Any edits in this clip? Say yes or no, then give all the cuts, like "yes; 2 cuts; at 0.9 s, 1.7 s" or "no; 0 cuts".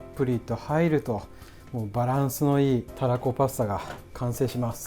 yes; 1 cut; at 2.9 s